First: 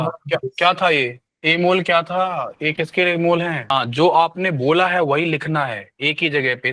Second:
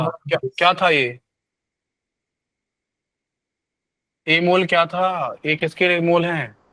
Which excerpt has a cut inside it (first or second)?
first